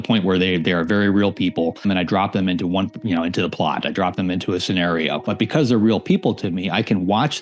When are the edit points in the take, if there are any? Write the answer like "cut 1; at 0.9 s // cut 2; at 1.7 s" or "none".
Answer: cut 1; at 1.9 s // cut 2; at 5.2 s